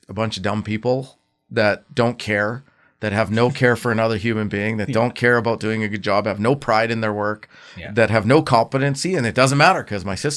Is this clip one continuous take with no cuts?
yes; 0 cuts

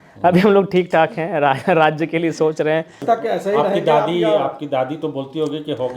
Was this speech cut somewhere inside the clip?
yes; 1 cut; at 3.0 s

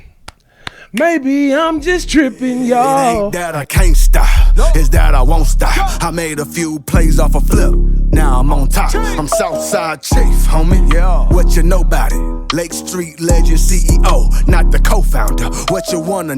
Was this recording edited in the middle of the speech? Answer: yes; 1 cut; at 3.3 s

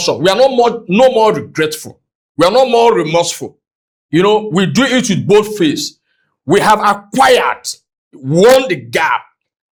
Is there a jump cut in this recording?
no; 0 cuts

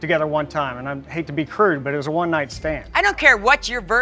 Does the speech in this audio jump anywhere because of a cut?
yes; 2 cuts; at 1.0 s, 2.8 s

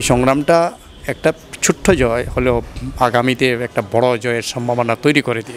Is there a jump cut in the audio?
no; 0 cuts

